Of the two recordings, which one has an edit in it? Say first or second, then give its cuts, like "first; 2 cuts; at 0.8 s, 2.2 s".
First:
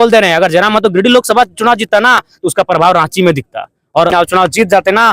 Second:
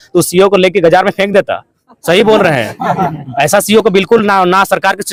first; 1 cut; at 4.1 s